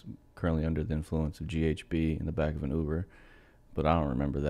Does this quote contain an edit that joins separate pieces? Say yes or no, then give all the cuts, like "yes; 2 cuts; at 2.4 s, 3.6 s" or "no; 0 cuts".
no; 0 cuts